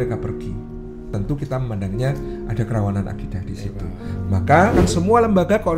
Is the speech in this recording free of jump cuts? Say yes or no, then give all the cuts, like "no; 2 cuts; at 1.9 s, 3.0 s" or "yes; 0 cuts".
no; 2 cuts; at 1.1 s, 4.8 s